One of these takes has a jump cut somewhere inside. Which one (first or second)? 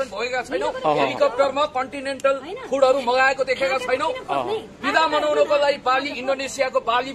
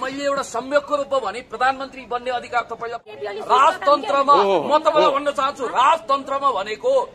second